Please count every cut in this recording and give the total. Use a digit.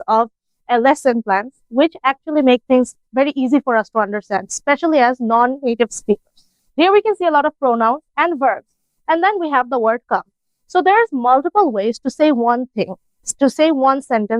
0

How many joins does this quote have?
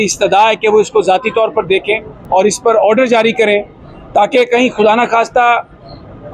1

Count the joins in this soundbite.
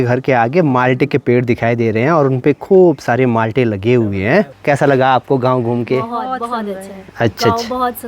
1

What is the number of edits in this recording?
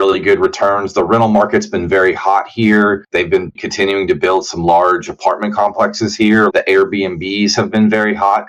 2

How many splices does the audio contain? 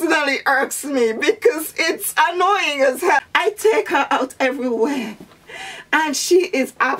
1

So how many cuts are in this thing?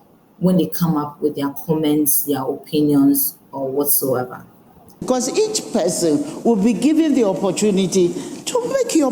1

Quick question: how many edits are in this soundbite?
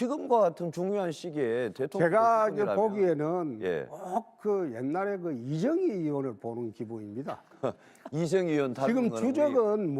1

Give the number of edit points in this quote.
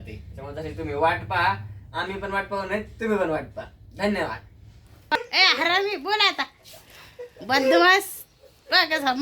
1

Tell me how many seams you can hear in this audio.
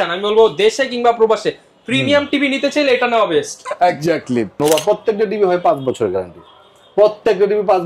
1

